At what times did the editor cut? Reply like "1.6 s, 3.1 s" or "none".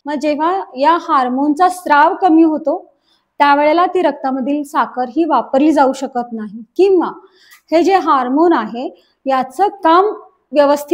none